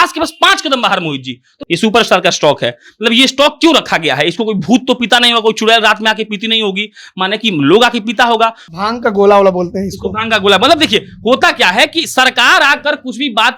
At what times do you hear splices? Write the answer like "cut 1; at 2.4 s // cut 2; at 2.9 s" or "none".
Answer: cut 1; at 1.5 s // cut 2; at 8.6 s

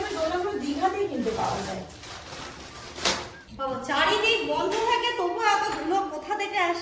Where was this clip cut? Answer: cut 1; at 3.4 s

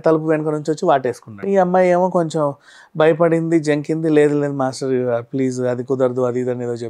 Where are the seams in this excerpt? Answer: cut 1; at 1.3 s

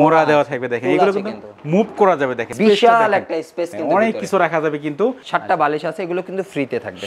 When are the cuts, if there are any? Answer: cut 1; at 2.5 s // cut 2; at 5.2 s

